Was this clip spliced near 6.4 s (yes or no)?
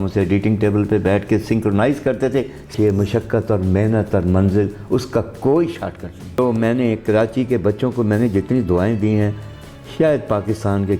yes